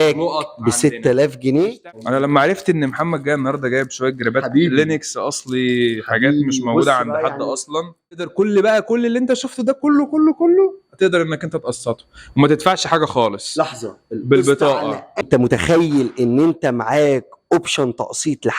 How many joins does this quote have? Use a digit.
3